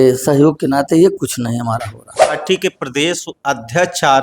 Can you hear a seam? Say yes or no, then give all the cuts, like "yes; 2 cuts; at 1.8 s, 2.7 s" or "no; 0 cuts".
yes; 1 cut; at 2.4 s